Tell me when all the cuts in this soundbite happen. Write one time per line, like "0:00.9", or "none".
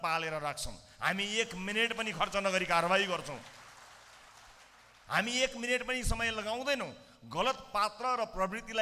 none